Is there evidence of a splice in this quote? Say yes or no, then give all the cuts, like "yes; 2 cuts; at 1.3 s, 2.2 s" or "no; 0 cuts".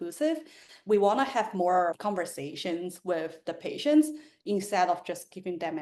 no; 0 cuts